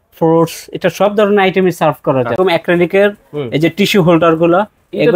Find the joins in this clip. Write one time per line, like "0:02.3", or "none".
0:02.3